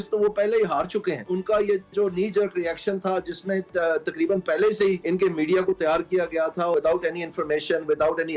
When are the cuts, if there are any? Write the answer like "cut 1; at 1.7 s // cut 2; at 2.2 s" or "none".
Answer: cut 1; at 1.3 s // cut 2; at 5.0 s // cut 3; at 6.7 s